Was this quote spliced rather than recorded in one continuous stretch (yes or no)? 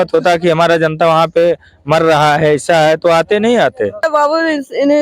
yes